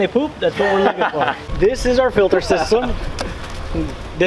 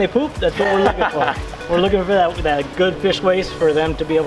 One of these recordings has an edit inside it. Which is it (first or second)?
first